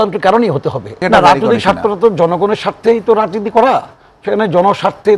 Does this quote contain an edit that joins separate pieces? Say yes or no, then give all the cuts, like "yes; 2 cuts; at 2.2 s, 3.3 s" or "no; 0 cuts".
yes; 1 cut; at 1.0 s